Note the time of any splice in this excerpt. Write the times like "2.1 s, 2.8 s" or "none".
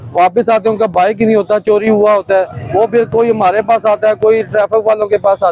none